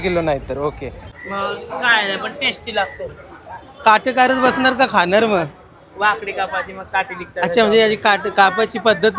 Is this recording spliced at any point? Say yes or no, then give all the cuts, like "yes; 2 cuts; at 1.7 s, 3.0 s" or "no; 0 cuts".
yes; 1 cut; at 1.0 s